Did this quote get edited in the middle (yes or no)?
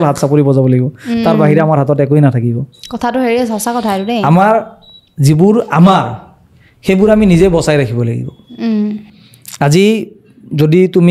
no